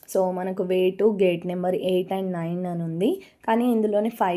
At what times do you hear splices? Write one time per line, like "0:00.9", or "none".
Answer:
none